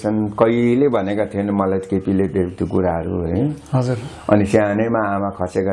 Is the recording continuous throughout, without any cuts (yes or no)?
yes